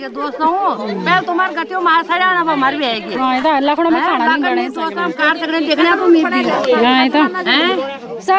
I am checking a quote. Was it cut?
no; 0 cuts

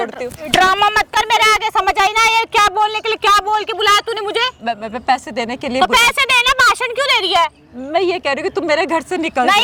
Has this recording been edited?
no; 0 cuts

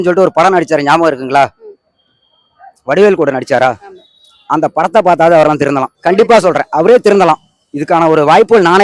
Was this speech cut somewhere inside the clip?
no; 0 cuts

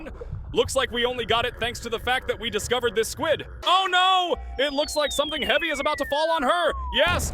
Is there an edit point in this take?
yes; 1 cut; at 3.5 s

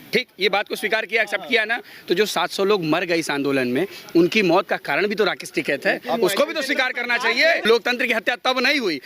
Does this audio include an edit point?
yes; 1 cut; at 7.7 s

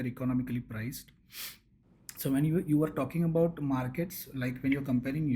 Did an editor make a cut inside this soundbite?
no; 0 cuts

